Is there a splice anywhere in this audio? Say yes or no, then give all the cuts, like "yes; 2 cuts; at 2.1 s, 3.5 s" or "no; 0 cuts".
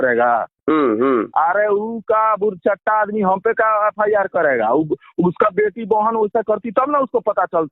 no; 0 cuts